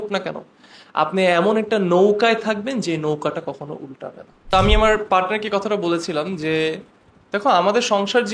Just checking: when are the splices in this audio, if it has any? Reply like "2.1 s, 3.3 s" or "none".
4.4 s